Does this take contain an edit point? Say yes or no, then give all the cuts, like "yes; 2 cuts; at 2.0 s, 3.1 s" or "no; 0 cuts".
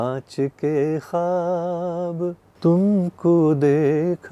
yes; 1 cut; at 2.5 s